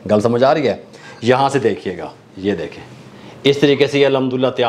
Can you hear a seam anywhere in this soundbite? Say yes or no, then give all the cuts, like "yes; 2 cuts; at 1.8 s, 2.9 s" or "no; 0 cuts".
no; 0 cuts